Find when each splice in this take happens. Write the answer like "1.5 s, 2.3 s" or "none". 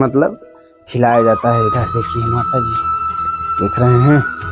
none